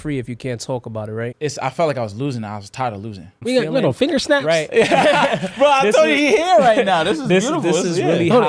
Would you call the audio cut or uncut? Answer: cut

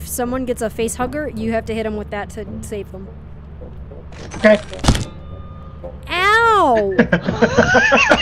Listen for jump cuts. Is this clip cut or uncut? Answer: uncut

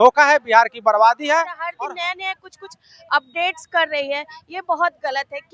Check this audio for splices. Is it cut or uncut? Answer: cut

